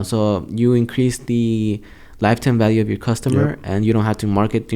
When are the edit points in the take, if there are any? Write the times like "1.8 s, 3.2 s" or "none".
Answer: none